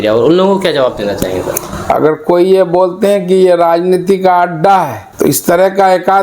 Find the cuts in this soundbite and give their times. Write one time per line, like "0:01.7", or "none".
0:05.0

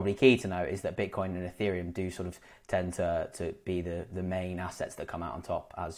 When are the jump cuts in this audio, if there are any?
none

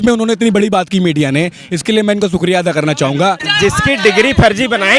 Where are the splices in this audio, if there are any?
0:03.5

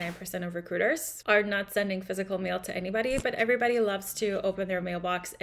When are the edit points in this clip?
0:01.1

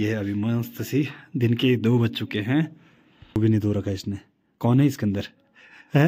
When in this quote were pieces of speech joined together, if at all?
0:03.3

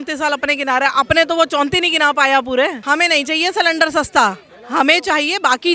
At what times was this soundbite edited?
0:02.8

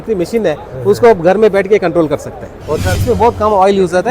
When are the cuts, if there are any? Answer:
0:02.9

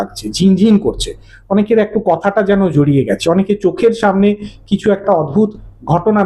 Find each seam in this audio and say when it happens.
none

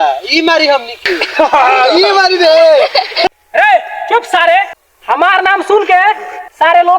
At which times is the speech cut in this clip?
0:03.3

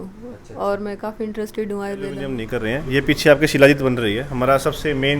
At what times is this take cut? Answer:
0:02.3

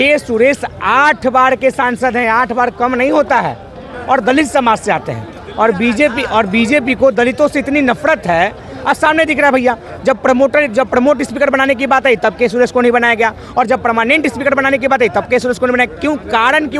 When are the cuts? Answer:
none

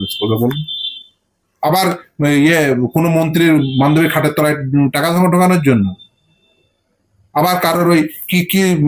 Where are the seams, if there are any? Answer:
none

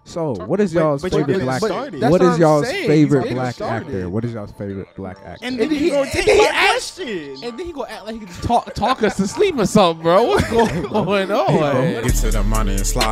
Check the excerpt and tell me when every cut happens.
0:12.0

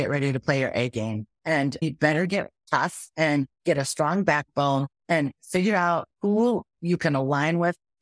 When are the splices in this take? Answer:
0:01.6
0:02.6
0:03.5
0:04.9

